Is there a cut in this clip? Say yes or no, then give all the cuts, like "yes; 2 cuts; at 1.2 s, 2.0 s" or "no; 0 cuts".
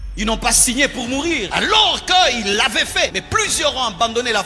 yes; 2 cuts; at 1.5 s, 3.2 s